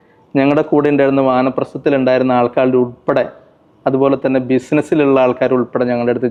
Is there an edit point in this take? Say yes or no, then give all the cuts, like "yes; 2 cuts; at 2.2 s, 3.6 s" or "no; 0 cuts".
no; 0 cuts